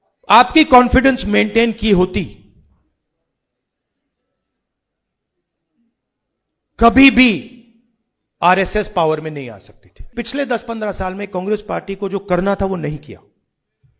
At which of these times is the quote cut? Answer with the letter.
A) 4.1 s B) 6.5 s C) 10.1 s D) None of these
C